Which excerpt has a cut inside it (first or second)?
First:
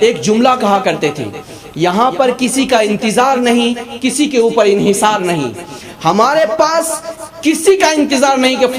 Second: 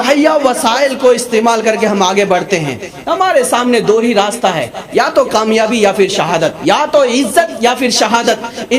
second